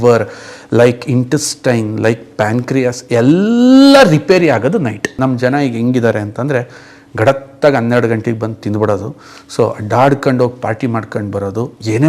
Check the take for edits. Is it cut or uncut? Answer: cut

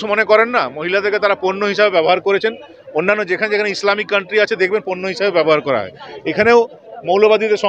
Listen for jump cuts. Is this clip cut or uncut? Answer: uncut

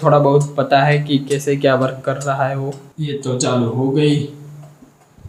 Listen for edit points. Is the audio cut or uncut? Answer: uncut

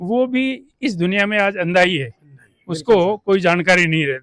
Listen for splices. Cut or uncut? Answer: uncut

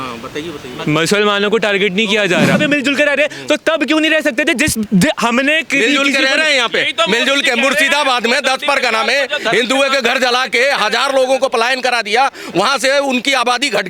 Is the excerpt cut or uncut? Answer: cut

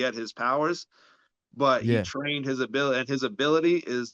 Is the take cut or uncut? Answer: uncut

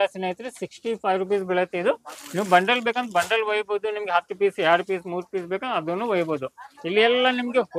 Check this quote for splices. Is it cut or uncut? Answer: uncut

